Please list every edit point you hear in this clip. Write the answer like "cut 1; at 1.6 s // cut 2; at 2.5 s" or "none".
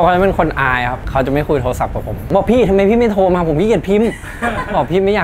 cut 1; at 1.0 s // cut 2; at 2.2 s